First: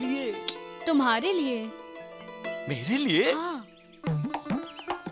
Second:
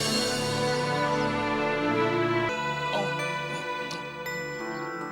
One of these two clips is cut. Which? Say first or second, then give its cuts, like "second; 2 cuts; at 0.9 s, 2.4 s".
second; 1 cut; at 2.5 s